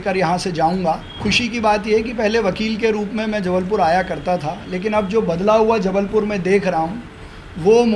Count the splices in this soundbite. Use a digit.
1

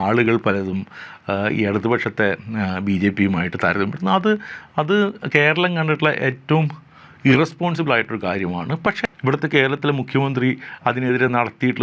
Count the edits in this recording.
1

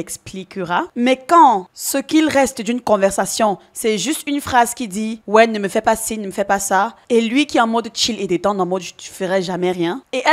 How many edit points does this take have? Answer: 1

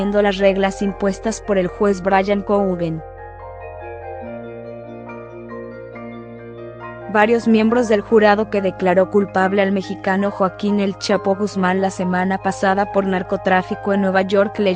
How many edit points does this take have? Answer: 2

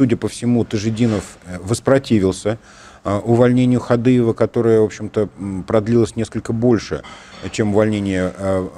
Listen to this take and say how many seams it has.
0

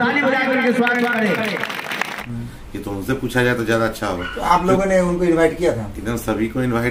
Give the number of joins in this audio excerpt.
1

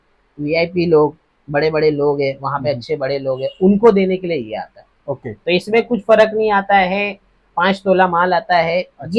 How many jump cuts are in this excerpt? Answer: 0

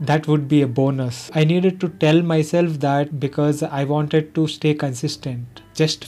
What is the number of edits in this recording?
2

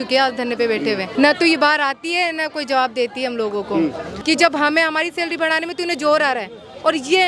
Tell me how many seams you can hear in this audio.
2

